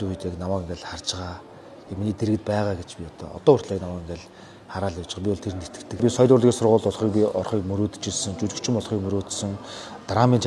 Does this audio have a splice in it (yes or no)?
yes